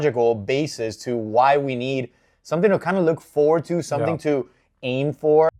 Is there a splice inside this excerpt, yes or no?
no